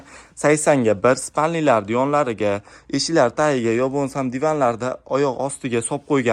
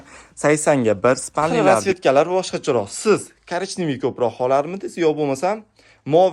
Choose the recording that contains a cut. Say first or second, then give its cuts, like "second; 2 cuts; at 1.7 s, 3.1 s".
second; 1 cut; at 1.7 s